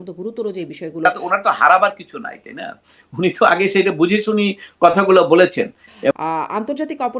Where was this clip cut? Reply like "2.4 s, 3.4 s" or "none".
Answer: 1.0 s, 6.1 s